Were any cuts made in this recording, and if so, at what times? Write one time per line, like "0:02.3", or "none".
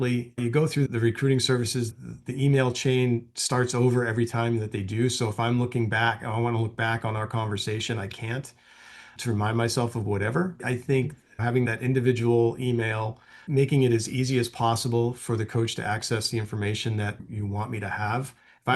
0:02.0
0:13.4